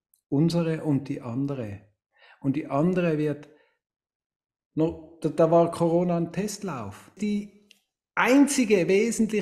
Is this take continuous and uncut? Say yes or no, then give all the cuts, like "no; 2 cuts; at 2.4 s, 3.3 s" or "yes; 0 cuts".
no; 1 cut; at 7.2 s